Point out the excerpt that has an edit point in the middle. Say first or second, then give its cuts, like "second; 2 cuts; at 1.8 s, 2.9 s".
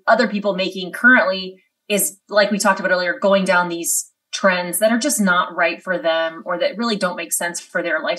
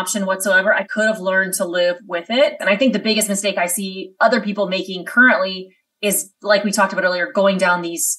second; 1 cut; at 2.6 s